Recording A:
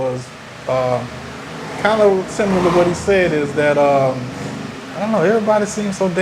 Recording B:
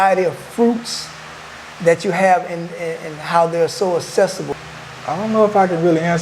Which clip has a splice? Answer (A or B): B